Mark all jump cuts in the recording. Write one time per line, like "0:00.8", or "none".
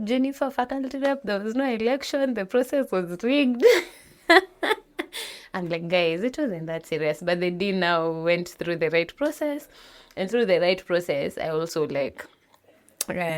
none